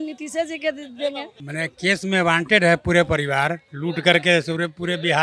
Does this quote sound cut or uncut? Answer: uncut